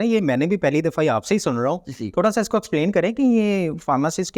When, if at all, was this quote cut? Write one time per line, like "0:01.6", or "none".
none